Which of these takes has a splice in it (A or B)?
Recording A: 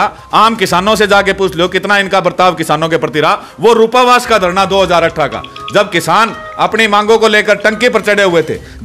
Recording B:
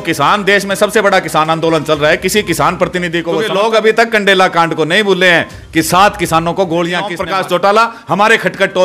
B